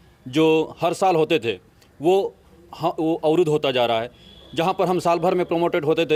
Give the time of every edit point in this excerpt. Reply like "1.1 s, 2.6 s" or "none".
none